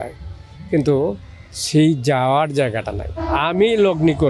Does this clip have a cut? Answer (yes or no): yes